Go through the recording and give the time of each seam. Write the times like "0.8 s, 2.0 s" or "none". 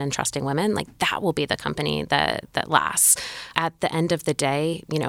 3.6 s